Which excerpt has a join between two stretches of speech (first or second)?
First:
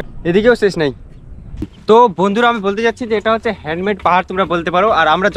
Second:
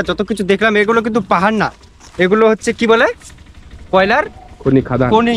first